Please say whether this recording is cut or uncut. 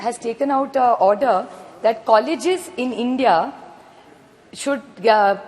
uncut